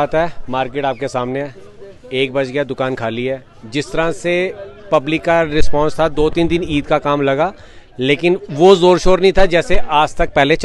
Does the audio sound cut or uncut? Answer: uncut